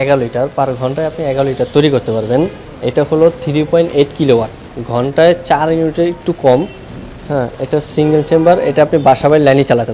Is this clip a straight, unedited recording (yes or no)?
yes